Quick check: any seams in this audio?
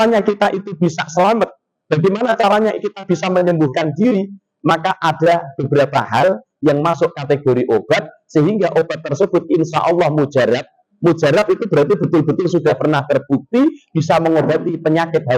no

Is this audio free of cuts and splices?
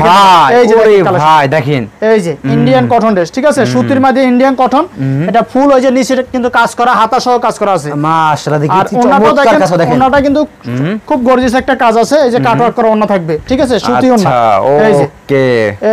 yes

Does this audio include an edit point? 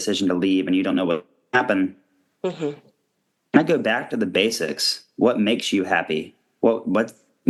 no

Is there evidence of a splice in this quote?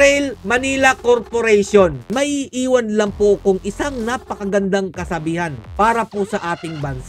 yes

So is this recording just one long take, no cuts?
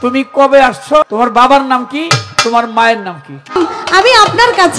no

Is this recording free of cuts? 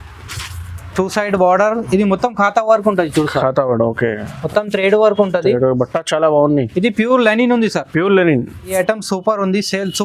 no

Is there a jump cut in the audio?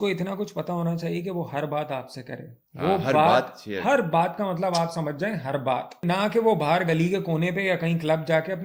yes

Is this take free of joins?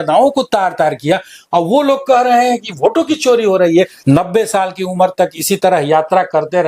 no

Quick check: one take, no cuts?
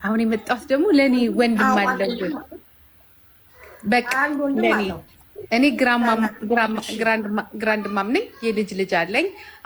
yes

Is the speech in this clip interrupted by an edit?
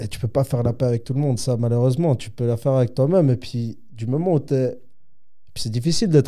no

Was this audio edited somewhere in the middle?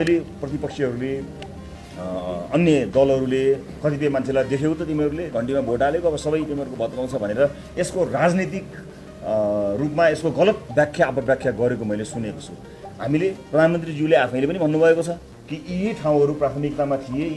no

